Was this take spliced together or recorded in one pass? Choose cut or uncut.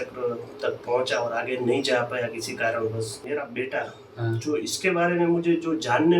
cut